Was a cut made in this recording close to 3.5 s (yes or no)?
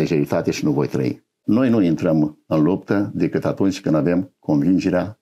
no